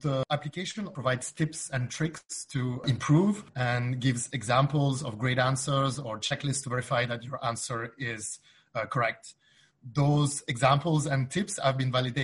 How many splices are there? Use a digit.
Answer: 1